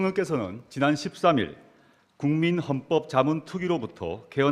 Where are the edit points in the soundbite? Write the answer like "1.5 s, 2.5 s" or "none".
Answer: 1.2 s